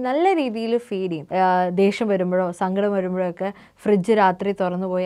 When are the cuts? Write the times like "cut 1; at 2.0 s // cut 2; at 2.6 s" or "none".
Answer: cut 1; at 1.2 s